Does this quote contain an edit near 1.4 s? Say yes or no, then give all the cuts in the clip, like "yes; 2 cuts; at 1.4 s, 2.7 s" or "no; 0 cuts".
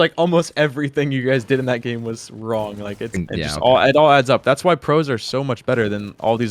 no; 1 cut; at 3.1 s